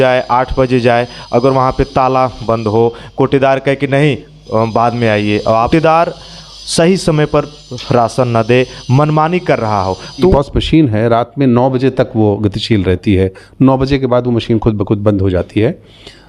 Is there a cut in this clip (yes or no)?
yes